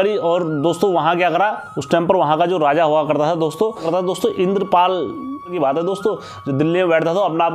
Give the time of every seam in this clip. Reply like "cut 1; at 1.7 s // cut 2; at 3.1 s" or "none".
cut 1; at 3.8 s // cut 2; at 5.5 s